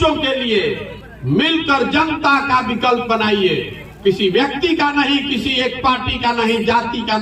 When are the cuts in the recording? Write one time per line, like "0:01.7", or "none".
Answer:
none